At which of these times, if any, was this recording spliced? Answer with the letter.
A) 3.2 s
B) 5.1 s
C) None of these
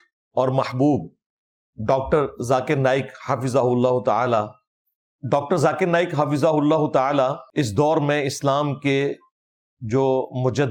C